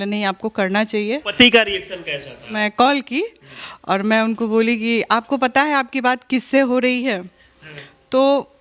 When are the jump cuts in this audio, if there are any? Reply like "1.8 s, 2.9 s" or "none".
1.3 s, 2.6 s